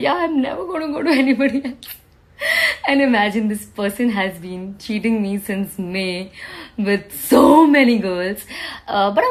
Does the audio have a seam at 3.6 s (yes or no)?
no